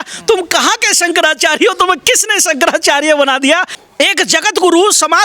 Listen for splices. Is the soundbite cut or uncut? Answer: cut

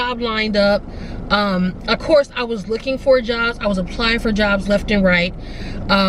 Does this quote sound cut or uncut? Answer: uncut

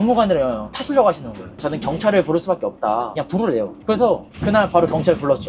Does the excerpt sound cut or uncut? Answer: cut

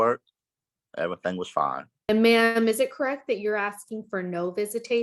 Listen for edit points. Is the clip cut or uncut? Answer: cut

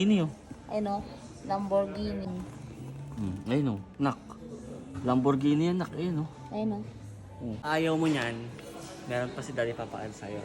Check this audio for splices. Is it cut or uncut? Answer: cut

